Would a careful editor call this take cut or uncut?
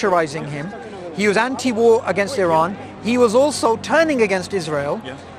uncut